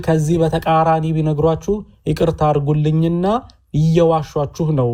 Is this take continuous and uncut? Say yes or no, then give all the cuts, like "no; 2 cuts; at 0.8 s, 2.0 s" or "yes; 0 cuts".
yes; 0 cuts